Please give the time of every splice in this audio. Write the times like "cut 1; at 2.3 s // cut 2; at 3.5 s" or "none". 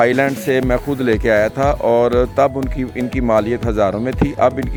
none